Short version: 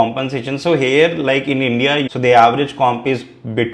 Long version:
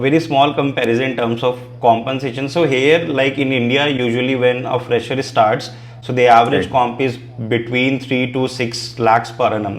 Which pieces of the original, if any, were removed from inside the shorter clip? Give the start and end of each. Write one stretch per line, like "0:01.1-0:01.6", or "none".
0:04.0-0:06.0